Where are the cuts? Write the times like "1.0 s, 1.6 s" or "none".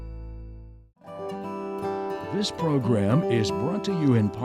1.2 s, 2.3 s